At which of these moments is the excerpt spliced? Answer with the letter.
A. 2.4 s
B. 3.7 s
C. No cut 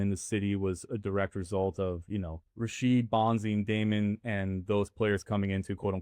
A